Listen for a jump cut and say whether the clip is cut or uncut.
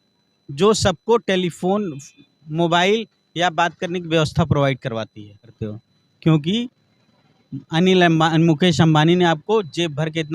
cut